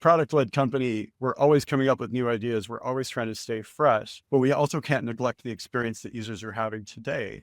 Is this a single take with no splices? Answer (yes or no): yes